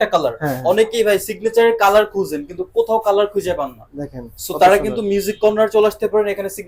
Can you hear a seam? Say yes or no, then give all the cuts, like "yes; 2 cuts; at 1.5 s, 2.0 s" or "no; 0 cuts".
no; 0 cuts